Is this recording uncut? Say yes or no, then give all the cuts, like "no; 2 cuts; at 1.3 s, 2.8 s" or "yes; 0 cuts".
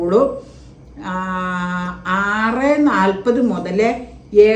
yes; 0 cuts